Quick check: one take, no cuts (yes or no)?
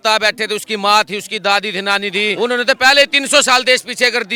yes